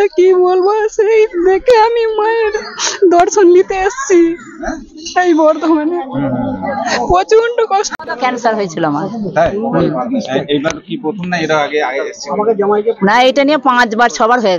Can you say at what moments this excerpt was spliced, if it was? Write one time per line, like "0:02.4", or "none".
0:07.9